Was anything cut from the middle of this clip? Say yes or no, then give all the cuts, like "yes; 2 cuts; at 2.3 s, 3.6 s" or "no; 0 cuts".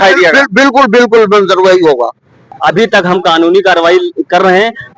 yes; 1 cut; at 2.5 s